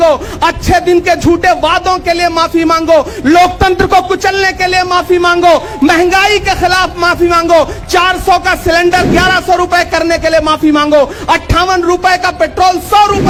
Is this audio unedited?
yes; 0 cuts

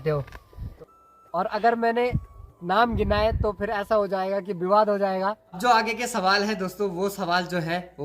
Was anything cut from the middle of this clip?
yes; 2 cuts; at 0.8 s, 5.5 s

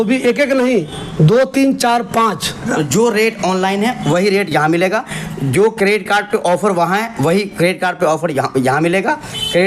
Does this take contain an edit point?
yes; 1 cut; at 2.7 s

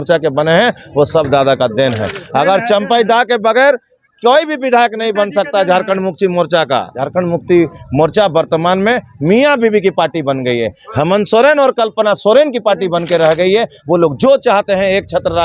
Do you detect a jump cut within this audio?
yes; 1 cut; at 7.0 s

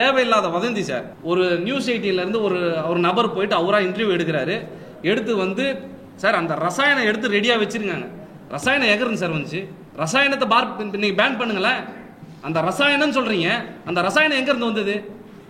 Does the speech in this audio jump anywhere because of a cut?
yes; 2 cuts; at 1.1 s, 9.8 s

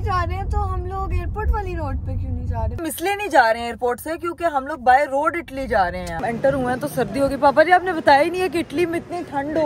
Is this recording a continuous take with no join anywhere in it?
no; 2 cuts; at 2.8 s, 6.2 s

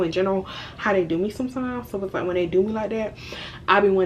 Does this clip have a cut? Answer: no; 0 cuts

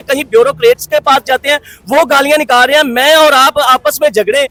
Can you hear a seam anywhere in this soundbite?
no; 0 cuts

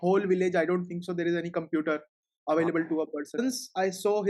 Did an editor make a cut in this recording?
yes; 1 cut; at 3.4 s

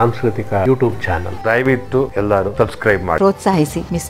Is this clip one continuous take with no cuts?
no; 1 cut; at 3.2 s

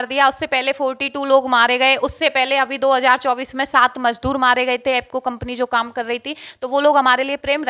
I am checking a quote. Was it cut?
no; 0 cuts

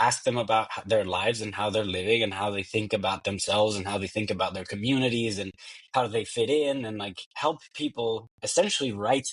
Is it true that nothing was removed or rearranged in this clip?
yes; 0 cuts

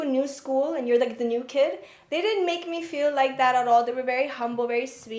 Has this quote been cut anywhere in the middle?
no; 0 cuts

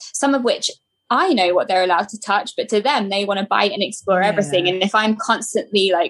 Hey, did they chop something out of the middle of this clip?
no; 0 cuts

